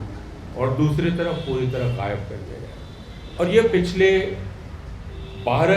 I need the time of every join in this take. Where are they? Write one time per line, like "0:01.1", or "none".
0:03.2